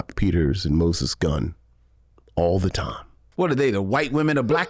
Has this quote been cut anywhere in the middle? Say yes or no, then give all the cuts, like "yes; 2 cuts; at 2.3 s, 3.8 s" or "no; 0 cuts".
yes; 1 cut; at 3.3 s